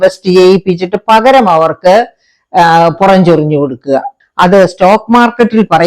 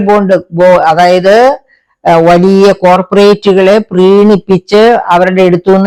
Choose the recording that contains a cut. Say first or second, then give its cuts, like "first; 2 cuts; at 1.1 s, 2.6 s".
first; 1 cut; at 4.1 s